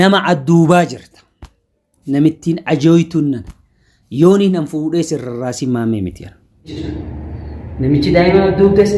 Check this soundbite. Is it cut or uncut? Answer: cut